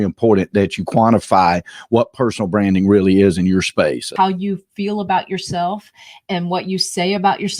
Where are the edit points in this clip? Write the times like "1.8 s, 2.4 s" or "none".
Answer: 4.1 s